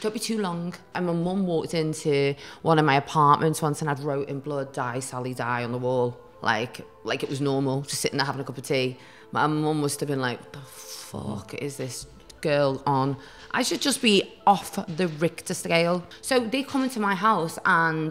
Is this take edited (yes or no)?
yes